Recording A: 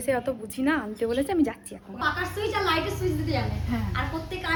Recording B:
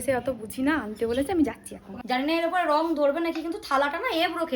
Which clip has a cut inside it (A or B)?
B